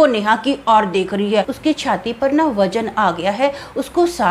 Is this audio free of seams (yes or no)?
no